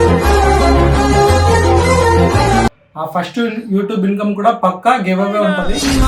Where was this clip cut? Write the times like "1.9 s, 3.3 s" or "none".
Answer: 2.7 s